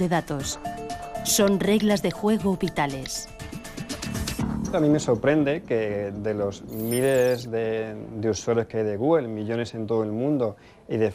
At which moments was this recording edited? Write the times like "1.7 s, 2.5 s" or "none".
none

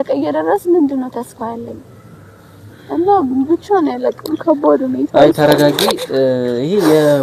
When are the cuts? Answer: none

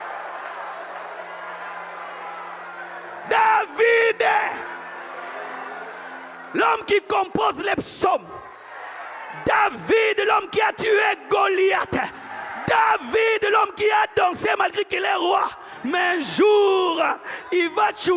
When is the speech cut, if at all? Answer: none

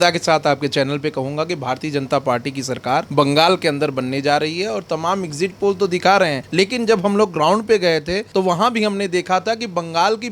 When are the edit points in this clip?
3.1 s, 6.4 s, 8.2 s

